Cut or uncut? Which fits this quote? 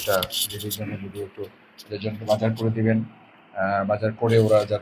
uncut